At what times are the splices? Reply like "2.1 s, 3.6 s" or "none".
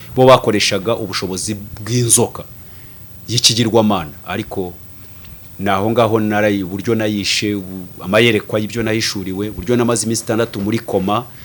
none